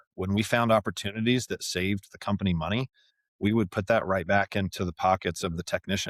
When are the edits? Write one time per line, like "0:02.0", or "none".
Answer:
none